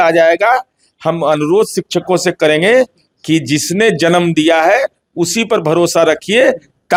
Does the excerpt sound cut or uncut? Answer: uncut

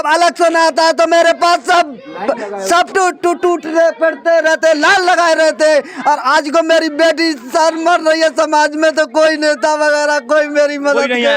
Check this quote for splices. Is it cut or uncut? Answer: uncut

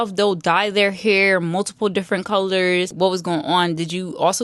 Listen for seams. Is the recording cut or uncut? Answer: cut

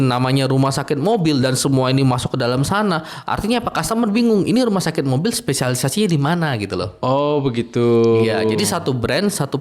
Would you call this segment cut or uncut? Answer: uncut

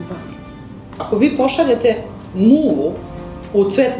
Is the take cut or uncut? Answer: cut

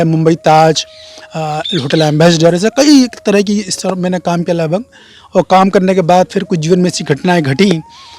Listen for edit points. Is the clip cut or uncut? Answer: uncut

